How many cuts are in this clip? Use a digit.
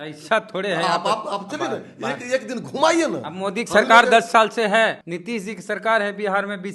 1